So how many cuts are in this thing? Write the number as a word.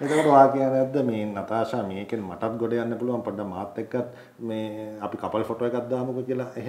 zero